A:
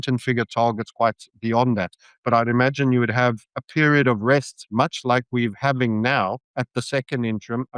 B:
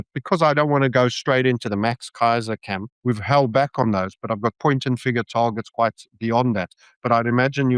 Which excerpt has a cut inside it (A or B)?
A